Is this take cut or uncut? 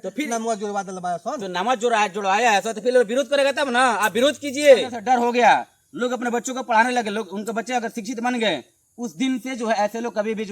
cut